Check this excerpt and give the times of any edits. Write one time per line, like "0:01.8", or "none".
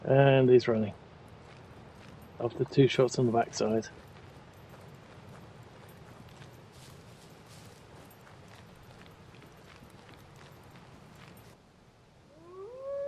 0:11.5